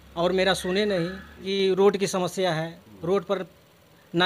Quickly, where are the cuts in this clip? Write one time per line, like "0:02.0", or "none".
0:01.5

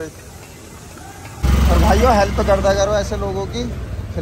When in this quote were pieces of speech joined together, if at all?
0:01.5

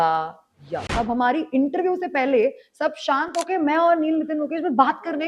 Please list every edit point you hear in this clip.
0:00.9

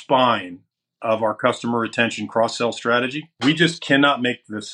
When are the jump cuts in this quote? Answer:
0:03.3

